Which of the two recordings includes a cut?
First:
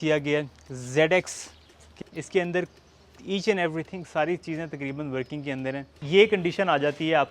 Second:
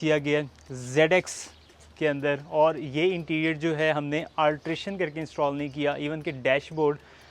first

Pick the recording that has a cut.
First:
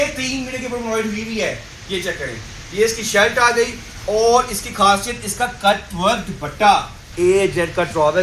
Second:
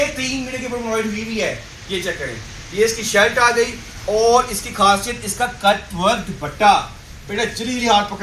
first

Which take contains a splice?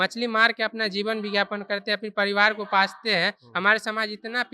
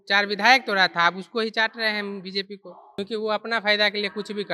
second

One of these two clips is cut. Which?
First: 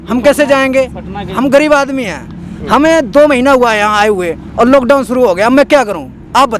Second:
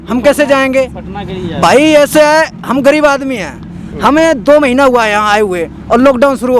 first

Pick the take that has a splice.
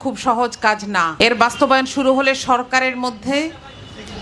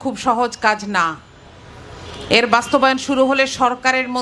first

